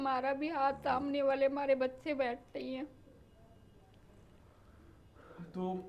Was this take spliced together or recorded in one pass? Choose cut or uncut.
uncut